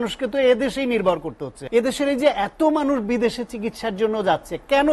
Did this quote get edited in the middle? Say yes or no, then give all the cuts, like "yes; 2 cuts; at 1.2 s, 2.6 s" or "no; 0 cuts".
yes; 1 cut; at 1.5 s